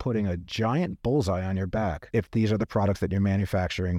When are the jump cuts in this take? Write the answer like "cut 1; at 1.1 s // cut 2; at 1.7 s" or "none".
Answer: cut 1; at 2.0 s

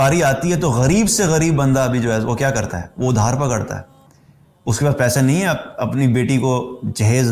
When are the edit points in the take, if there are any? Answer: none

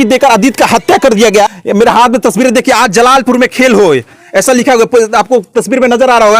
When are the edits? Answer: cut 1; at 1.5 s

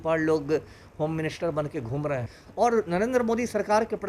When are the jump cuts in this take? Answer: cut 1; at 2.4 s

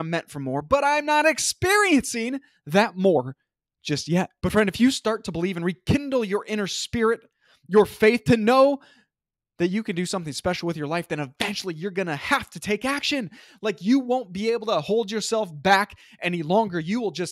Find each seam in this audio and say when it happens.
cut 1; at 4.3 s

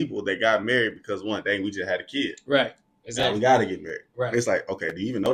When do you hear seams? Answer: none

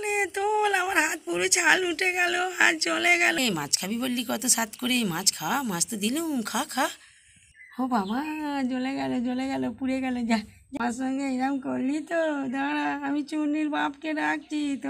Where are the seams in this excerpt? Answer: cut 1; at 3.4 s // cut 2; at 10.8 s

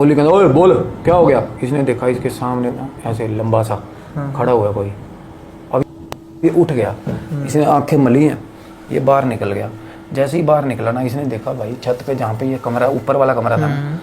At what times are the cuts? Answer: cut 1; at 5.8 s

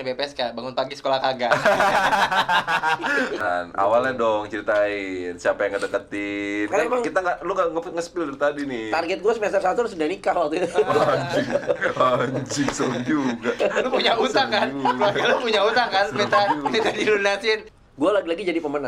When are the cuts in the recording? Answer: cut 1; at 3.4 s // cut 2; at 17.7 s

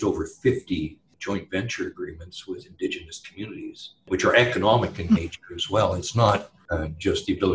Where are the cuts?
cut 1; at 1.1 s // cut 2; at 3.9 s // cut 3; at 6.6 s

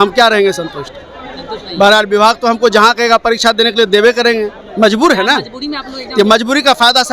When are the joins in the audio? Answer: none

